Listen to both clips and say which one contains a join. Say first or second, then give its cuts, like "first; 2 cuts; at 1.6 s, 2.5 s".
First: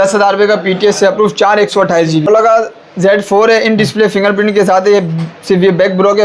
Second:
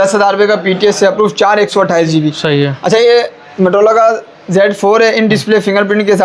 first; 1 cut; at 2.3 s